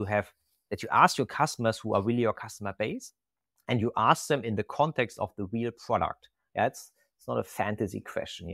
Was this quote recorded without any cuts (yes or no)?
yes